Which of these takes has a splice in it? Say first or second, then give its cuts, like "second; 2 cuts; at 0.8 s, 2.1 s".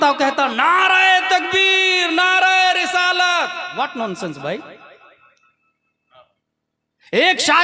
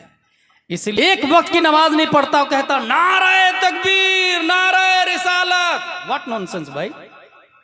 second; 1 cut; at 1.0 s